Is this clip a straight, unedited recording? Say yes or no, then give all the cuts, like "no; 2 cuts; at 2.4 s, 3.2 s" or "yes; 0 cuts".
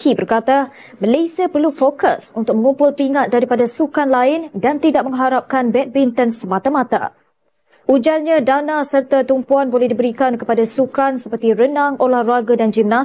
yes; 0 cuts